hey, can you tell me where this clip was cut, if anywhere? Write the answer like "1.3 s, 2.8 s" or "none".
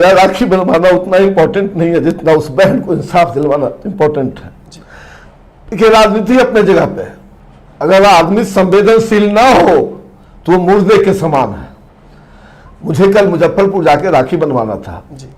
none